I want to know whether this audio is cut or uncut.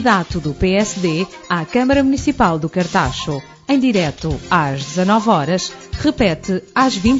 uncut